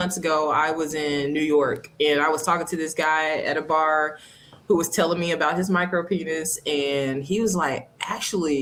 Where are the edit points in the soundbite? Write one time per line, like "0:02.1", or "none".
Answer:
none